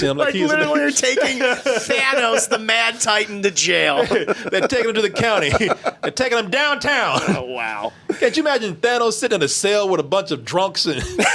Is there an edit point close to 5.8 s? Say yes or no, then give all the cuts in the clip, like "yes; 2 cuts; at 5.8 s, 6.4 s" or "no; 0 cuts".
no; 0 cuts